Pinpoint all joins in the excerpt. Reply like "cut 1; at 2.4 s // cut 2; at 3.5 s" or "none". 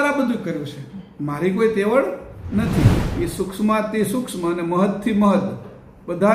cut 1; at 3.0 s